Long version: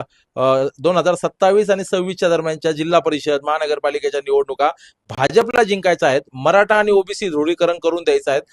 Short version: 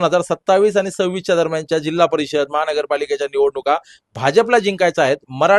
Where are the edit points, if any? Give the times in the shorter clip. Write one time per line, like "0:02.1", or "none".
0:04.4